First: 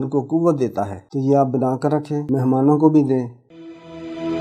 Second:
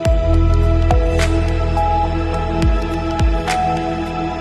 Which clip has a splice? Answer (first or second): first